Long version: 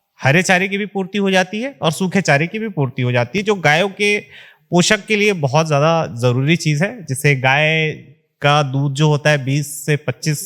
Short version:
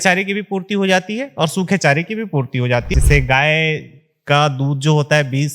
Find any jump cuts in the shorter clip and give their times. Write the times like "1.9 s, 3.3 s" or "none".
2.9 s